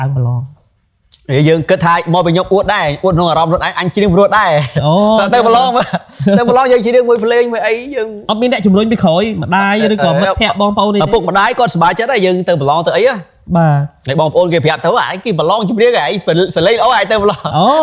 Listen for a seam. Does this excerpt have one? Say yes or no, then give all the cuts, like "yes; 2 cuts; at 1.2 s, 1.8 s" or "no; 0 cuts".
no; 0 cuts